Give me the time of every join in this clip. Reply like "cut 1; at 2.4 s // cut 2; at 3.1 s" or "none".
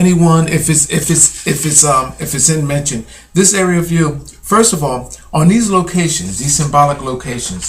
cut 1; at 4.1 s